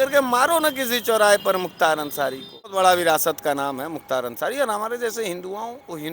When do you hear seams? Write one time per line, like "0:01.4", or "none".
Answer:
0:02.7